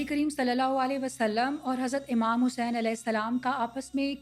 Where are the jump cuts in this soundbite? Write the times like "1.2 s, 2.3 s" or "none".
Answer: none